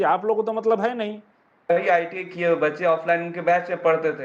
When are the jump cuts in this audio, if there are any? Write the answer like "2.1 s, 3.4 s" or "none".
1.7 s